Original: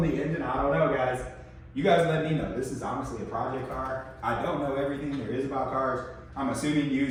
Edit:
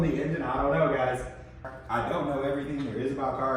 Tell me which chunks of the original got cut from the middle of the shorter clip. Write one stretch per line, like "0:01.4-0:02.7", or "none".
0:01.6-0:04.0